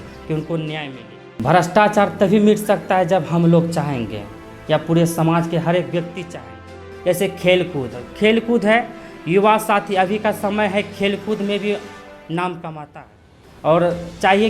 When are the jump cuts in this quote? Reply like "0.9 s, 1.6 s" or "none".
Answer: 0.9 s, 6.9 s